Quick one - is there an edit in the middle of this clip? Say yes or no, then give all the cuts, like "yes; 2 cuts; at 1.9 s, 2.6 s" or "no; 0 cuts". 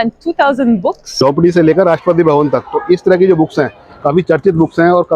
yes; 1 cut; at 1.1 s